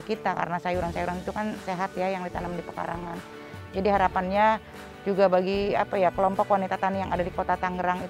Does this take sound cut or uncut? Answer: uncut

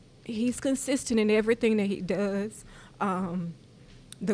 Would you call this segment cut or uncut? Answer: uncut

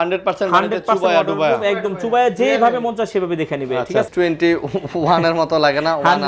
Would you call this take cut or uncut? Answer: cut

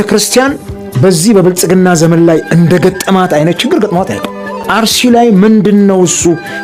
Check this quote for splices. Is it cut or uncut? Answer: uncut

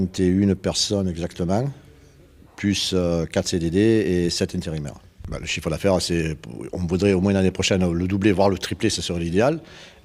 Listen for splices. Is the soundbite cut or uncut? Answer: cut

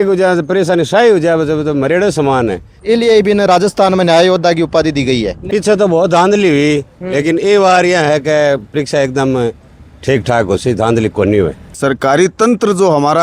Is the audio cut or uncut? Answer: cut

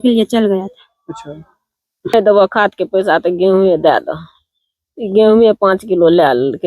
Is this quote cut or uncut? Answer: cut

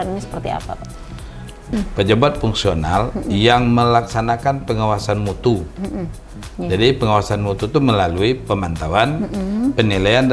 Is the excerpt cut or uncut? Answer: cut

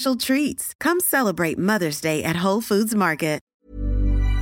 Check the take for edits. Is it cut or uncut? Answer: cut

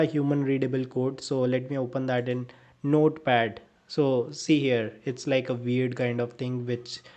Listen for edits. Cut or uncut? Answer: uncut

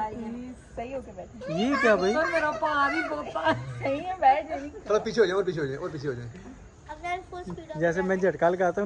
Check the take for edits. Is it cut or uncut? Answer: uncut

